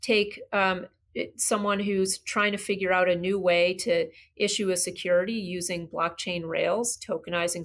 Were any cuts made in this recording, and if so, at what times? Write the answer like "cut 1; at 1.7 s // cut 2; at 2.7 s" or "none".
none